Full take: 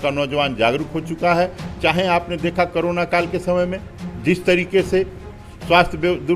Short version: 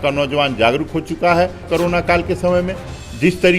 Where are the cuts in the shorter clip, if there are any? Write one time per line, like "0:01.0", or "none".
0:01.7